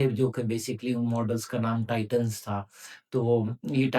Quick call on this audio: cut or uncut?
uncut